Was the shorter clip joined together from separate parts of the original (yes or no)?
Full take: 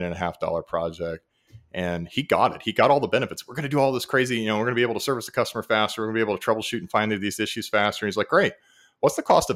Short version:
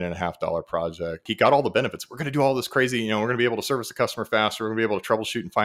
yes